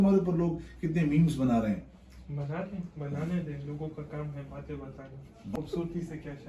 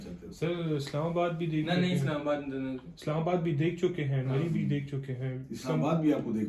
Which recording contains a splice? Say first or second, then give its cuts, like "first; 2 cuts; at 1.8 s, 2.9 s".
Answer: first; 1 cut; at 5.5 s